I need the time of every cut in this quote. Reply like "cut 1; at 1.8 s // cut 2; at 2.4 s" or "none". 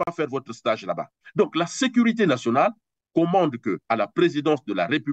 cut 1; at 1.2 s